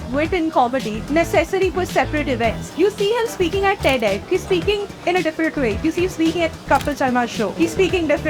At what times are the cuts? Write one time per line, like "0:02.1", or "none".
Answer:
0:01.0
0:02.6
0:04.2
0:05.8
0:07.5